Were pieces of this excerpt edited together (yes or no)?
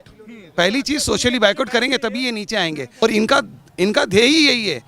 yes